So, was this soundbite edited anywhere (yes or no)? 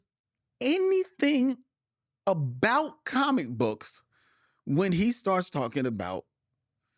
no